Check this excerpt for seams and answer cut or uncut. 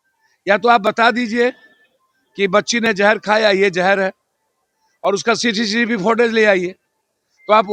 uncut